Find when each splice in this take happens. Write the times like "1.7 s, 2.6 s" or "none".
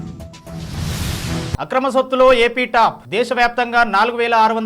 1.6 s

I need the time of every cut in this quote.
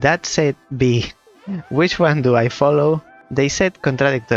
3.2 s

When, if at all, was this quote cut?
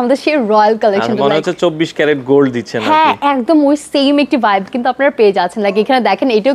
none

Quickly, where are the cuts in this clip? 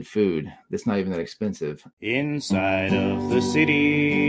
1.9 s

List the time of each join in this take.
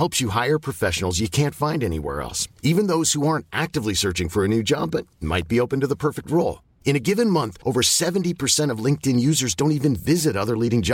none

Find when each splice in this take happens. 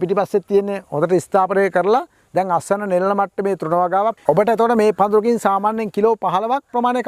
4.2 s

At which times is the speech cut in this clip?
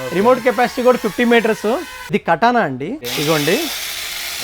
1.9 s, 3.0 s

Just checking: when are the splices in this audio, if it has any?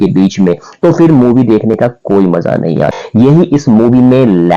3.0 s

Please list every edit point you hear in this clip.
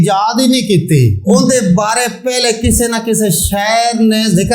1.2 s

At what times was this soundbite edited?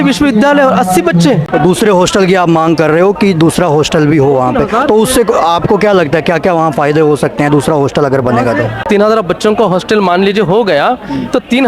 1.5 s, 8.8 s

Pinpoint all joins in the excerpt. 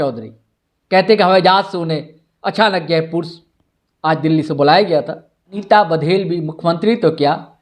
5.6 s

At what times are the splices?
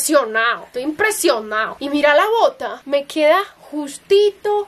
none

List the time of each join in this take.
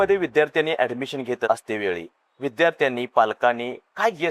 1.5 s

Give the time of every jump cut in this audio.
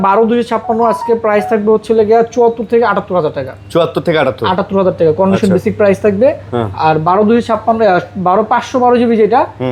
none

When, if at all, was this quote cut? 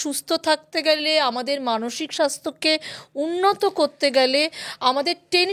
none

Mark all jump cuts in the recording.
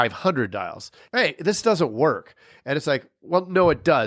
1.0 s

